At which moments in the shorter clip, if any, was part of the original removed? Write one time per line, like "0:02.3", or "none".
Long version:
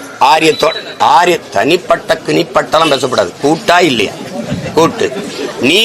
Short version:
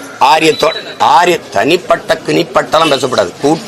none